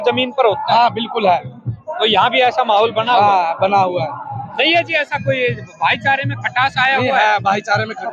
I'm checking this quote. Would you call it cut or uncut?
uncut